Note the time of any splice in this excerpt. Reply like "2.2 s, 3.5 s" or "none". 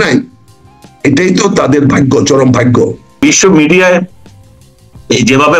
3.2 s